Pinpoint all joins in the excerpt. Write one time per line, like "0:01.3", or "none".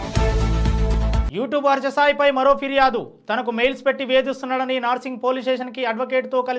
0:01.0